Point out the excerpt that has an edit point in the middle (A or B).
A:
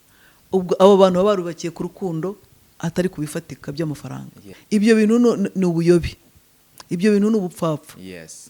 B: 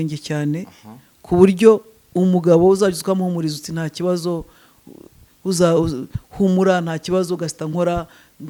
A